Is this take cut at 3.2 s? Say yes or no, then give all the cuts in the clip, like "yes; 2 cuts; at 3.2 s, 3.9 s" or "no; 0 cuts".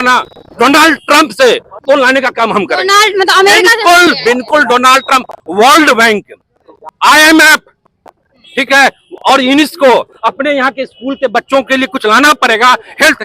no; 0 cuts